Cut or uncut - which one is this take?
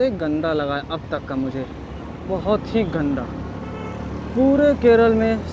uncut